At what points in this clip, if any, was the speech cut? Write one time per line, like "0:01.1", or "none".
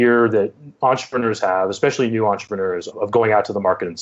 0:03.0